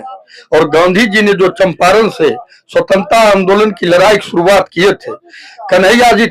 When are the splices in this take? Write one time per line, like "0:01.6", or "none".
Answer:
none